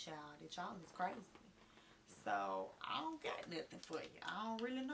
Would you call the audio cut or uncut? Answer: uncut